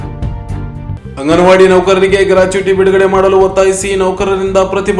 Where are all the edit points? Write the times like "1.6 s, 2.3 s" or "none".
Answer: 0.9 s